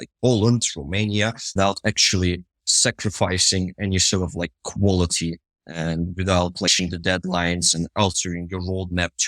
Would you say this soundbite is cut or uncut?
cut